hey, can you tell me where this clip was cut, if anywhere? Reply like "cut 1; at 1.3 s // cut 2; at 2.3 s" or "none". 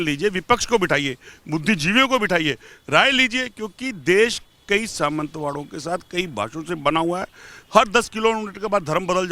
none